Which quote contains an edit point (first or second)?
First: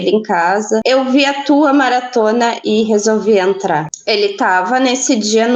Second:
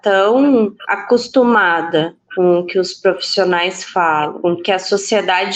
first